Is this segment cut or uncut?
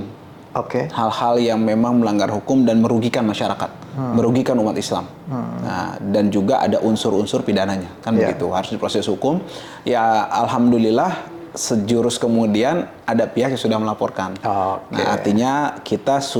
uncut